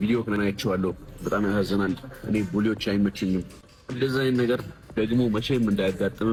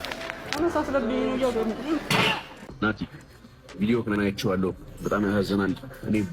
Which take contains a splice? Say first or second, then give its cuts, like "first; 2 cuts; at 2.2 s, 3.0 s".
second; 1 cut; at 2.6 s